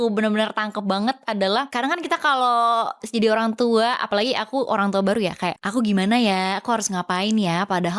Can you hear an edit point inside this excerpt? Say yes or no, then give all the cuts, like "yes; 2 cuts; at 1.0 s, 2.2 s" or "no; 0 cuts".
yes; 2 cuts; at 1.7 s, 5.6 s